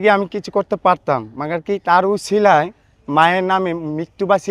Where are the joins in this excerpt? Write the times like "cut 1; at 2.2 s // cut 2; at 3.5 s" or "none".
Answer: none